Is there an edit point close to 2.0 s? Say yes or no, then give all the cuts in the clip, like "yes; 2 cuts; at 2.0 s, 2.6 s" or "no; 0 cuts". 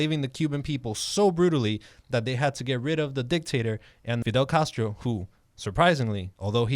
no; 1 cut; at 4.2 s